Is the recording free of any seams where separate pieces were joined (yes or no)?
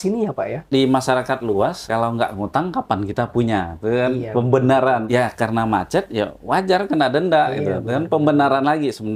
no